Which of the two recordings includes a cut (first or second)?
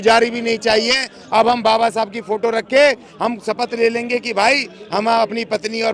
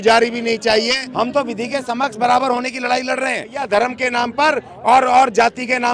second